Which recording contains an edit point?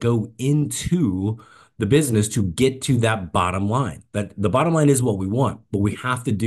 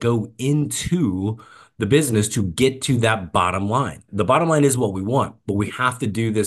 second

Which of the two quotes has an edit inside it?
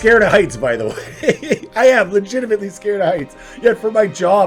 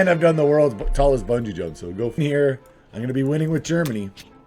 second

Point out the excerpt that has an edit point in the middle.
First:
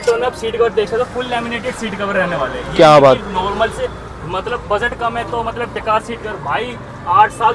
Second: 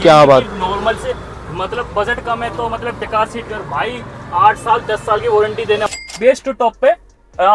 second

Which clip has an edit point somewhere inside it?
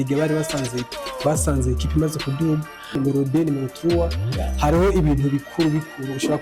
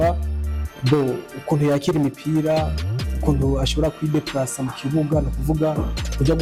first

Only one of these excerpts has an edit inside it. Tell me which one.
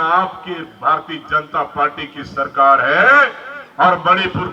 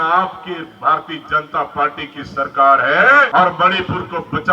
second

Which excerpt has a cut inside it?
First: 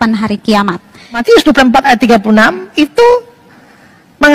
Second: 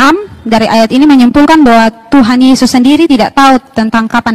first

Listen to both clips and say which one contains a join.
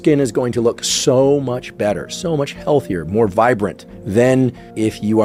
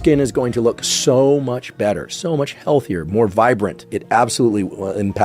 second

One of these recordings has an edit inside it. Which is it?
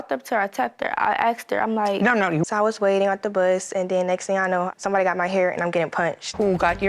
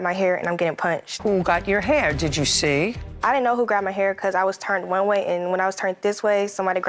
first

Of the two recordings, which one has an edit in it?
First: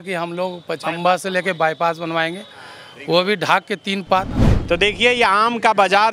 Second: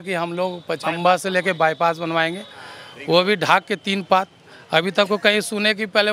first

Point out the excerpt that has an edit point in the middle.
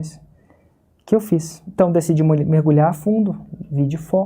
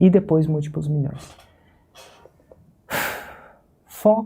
first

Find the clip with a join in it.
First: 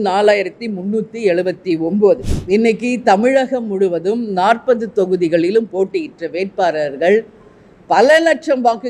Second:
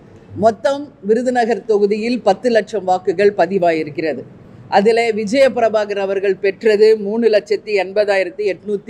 first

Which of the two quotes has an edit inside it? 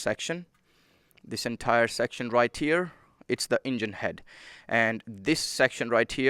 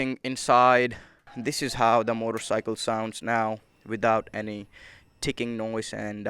second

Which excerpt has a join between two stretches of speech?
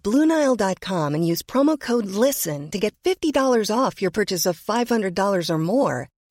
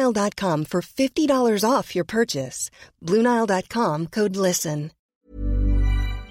second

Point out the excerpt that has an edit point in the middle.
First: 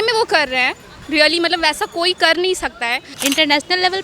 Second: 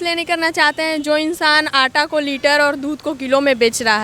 first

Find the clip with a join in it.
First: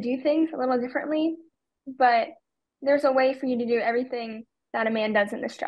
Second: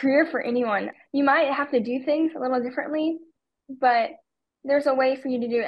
second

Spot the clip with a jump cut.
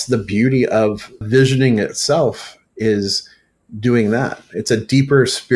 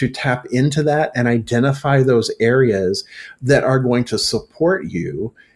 first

